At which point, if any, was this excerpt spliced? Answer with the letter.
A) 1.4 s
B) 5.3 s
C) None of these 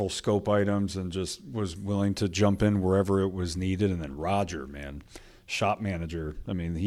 C